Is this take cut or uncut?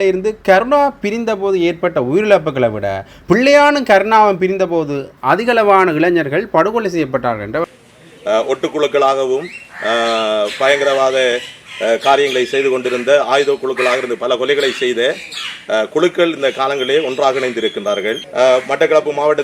cut